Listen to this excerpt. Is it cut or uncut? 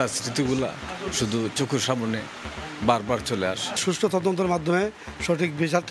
cut